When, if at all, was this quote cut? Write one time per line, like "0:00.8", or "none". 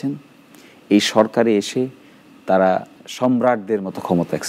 0:03.0